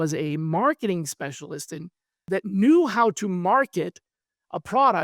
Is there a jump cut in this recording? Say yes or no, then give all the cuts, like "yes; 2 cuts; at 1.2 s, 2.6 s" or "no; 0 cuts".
yes; 1 cut; at 2.2 s